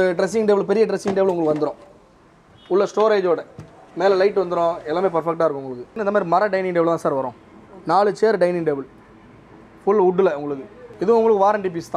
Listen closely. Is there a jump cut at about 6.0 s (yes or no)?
yes